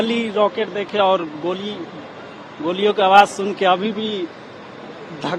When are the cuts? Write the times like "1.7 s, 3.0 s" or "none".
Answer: none